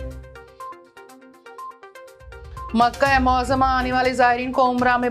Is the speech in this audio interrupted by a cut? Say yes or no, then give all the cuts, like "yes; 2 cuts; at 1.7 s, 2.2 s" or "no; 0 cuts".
yes; 1 cut; at 1.3 s